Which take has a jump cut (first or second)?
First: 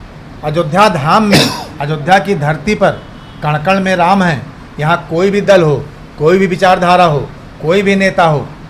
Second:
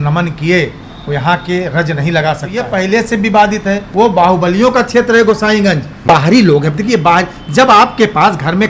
second